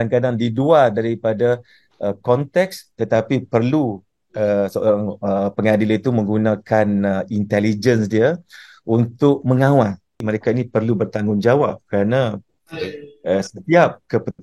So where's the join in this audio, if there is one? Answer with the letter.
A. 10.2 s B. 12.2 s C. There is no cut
A